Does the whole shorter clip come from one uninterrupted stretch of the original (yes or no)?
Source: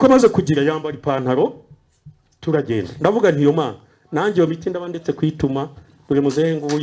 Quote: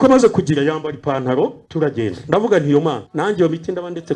no